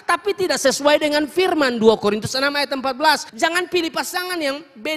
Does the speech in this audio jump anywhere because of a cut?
yes; 1 cut; at 3.3 s

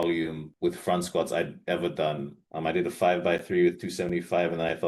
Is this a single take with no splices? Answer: yes; 0 cuts

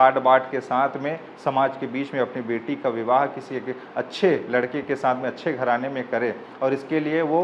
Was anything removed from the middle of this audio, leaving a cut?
no; 0 cuts

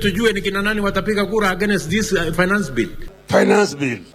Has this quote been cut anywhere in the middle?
yes; 1 cut; at 3.1 s

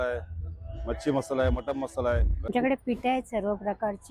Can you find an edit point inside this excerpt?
yes; 1 cut; at 2.5 s

